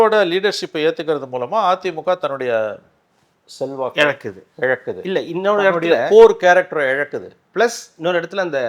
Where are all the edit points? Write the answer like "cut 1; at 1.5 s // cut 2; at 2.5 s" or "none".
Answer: none